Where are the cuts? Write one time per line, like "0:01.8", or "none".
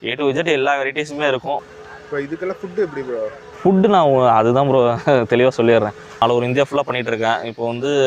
0:01.6
0:06.2